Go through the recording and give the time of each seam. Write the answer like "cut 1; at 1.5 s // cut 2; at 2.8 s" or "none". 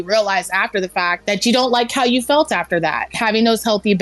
cut 1; at 1.2 s // cut 2; at 3.2 s